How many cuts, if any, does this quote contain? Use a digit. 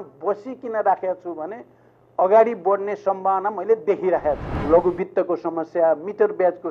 1